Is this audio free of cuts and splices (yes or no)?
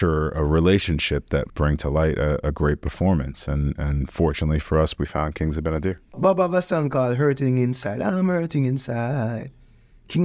no